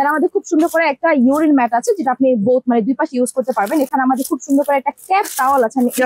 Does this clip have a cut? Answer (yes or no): no